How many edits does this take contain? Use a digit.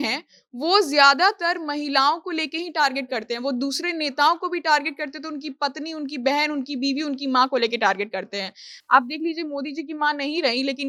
0